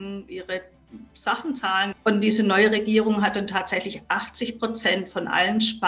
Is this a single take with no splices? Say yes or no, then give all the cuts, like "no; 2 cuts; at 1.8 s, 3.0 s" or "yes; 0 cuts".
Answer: no; 1 cut; at 1.9 s